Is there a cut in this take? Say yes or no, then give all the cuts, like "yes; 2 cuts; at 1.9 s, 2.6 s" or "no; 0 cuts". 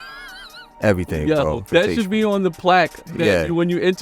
yes; 1 cut; at 1.6 s